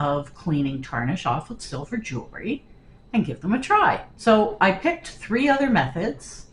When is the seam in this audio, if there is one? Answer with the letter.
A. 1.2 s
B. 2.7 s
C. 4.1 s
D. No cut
C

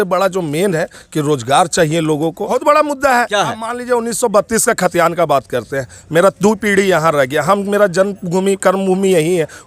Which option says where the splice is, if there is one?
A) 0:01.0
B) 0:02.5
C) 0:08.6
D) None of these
B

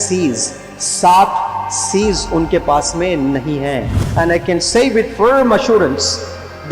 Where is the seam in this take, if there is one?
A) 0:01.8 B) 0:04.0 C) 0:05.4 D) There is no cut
B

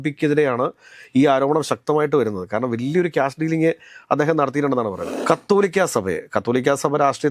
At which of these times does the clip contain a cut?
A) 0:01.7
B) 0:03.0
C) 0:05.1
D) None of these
C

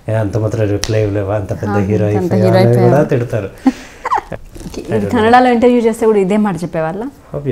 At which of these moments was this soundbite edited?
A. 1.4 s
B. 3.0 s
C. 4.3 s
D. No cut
C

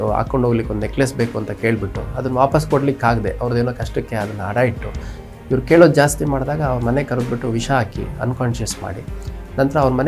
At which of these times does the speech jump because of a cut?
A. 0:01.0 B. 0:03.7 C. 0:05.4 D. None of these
D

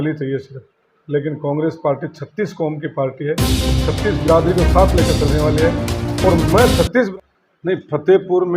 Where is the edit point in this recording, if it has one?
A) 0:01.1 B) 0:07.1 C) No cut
B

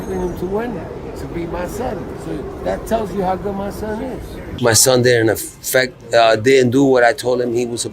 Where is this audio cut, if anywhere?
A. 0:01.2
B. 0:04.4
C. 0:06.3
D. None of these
B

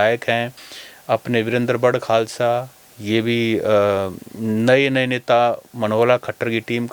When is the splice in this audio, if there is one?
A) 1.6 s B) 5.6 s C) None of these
C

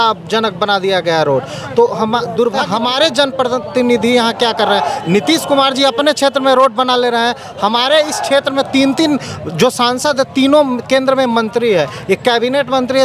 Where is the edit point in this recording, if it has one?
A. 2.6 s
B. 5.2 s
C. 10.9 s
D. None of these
A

